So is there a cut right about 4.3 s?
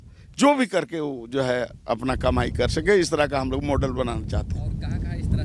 no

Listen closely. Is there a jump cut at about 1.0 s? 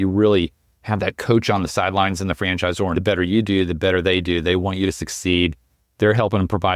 no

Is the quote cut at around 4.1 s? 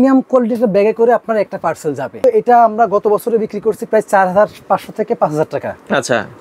no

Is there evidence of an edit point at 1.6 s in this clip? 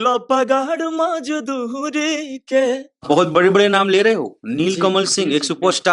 no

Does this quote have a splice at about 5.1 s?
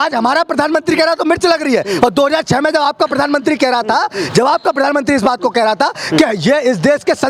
no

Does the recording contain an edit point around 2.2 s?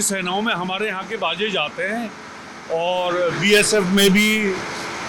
no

